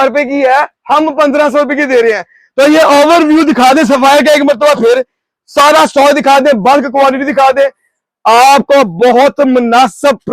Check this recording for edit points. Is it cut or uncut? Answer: uncut